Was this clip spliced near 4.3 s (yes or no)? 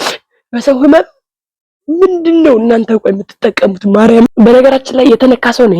yes